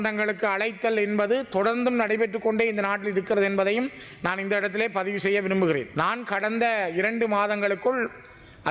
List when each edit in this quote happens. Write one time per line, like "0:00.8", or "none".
0:05.9